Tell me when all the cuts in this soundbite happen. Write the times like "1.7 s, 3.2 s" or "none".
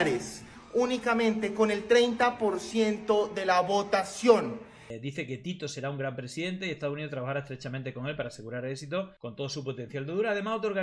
4.9 s